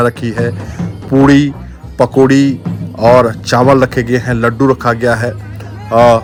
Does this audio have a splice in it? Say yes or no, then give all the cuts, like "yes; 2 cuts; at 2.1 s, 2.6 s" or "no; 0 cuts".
no; 0 cuts